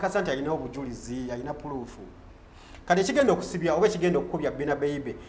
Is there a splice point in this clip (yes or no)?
no